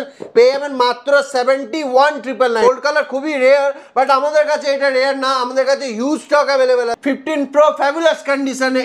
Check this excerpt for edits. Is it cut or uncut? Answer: cut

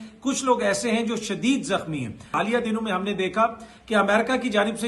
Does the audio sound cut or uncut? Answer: cut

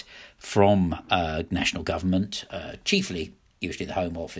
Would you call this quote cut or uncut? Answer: uncut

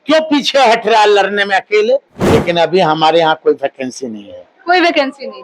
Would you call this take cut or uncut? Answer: cut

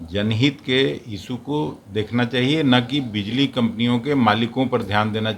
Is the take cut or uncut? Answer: uncut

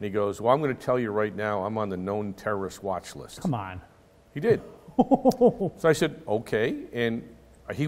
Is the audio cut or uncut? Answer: uncut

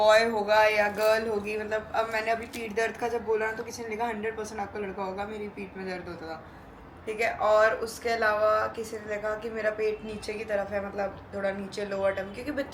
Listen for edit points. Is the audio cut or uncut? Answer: uncut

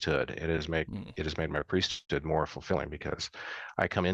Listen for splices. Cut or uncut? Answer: cut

